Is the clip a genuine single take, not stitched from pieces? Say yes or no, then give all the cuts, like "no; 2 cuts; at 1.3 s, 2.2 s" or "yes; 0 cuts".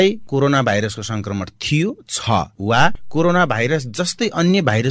no; 1 cut; at 2.5 s